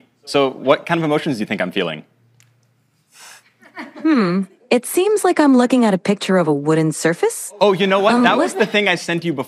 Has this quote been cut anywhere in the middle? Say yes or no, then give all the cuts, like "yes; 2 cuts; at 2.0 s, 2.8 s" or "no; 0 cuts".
no; 0 cuts